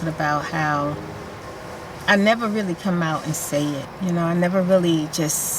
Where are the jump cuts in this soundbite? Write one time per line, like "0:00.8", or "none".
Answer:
0:01.5
0:03.9